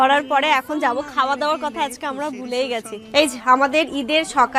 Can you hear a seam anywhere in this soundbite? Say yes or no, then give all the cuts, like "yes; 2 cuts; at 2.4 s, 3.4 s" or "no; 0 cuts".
yes; 1 cut; at 3.1 s